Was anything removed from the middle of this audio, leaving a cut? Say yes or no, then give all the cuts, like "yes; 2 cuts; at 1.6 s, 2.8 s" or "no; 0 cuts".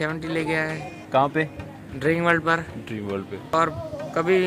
yes; 2 cuts; at 1.0 s, 3.5 s